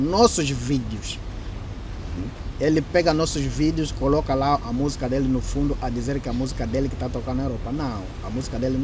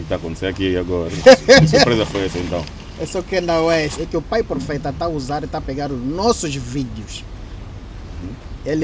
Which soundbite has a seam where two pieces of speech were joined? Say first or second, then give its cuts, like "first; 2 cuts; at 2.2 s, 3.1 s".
second; 1 cut; at 4.0 s